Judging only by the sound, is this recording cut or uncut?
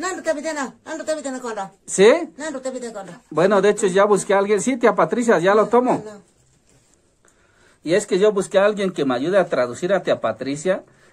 uncut